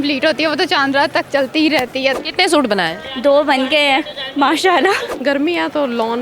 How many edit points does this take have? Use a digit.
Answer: 2